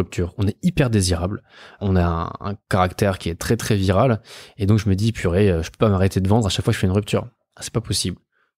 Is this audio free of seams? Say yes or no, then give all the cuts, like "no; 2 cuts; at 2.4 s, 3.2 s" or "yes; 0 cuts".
no; 1 cut; at 1.8 s